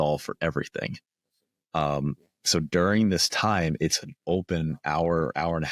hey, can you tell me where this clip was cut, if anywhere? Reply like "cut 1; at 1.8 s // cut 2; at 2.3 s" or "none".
none